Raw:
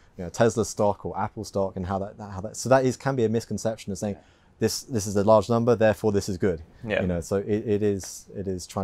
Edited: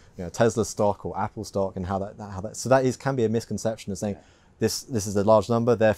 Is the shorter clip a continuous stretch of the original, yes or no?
yes